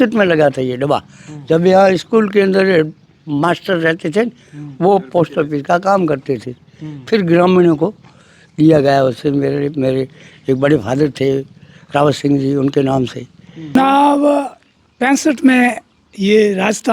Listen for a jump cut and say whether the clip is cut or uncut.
cut